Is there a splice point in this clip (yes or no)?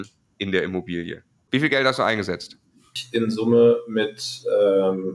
yes